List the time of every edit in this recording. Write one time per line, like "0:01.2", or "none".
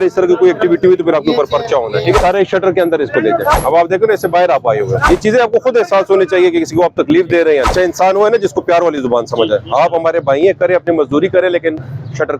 0:02.2
0:03.5
0:05.0
0:07.7